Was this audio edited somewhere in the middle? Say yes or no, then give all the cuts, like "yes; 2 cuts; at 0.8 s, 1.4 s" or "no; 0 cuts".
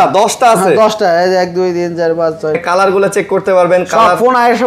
yes; 1 cut; at 2.6 s